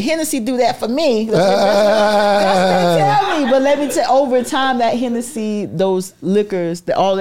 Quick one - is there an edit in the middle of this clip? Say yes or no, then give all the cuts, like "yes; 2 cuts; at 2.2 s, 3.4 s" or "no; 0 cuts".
no; 0 cuts